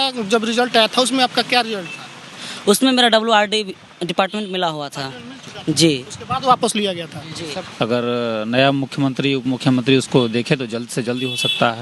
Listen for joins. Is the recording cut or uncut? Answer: cut